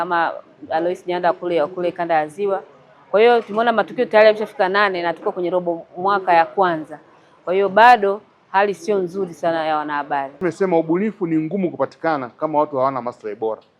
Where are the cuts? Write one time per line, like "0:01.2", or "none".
0:10.3